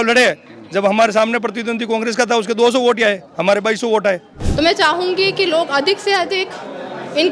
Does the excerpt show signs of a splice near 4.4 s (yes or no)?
yes